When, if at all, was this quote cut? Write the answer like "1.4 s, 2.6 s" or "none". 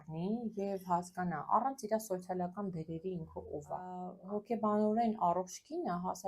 4.1 s